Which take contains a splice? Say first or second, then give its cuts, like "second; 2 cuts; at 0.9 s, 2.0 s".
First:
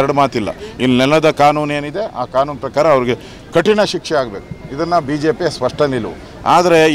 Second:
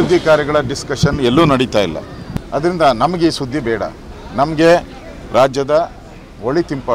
second; 1 cut; at 2.9 s